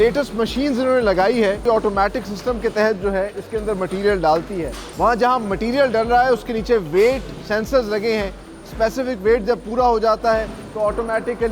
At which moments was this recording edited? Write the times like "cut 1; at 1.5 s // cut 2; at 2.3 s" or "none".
cut 1; at 1.6 s // cut 2; at 4.8 s